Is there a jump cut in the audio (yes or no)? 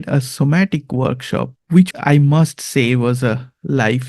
yes